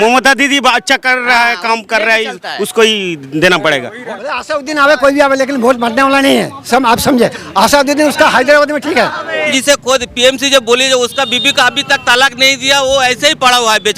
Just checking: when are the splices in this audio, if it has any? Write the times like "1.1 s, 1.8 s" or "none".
4.2 s, 9.5 s